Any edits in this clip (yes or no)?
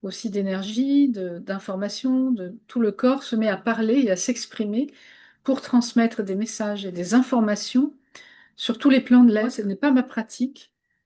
yes